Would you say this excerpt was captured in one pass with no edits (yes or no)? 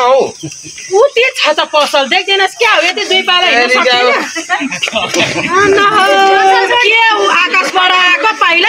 yes